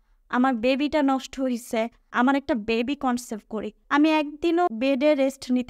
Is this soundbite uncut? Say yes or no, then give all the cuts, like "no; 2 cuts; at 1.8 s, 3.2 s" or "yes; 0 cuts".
no; 3 cuts; at 2.0 s, 3.8 s, 4.7 s